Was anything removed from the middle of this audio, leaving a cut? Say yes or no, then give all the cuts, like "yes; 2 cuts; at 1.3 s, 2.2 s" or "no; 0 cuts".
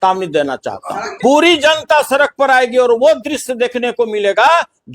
yes; 1 cut; at 1.2 s